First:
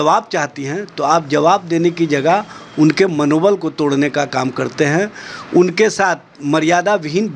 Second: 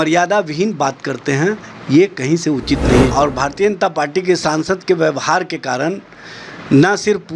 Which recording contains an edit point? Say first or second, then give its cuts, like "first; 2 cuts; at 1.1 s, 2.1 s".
second; 1 cut; at 3.1 s